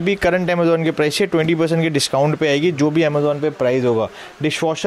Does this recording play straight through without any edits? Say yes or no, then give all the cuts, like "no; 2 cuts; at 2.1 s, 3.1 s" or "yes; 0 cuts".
yes; 0 cuts